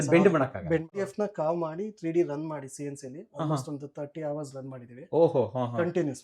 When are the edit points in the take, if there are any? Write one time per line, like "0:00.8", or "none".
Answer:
0:01.0